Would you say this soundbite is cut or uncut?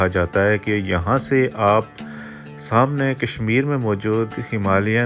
uncut